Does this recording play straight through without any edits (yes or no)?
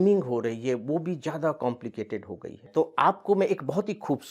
no